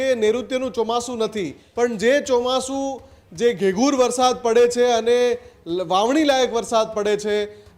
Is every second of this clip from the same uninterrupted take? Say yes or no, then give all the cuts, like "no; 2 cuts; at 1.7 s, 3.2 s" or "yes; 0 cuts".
no; 1 cut; at 1.6 s